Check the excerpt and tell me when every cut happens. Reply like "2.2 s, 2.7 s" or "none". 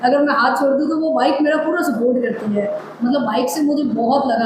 none